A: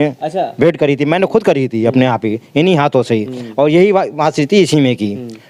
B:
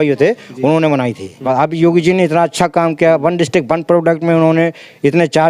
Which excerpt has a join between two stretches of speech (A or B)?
B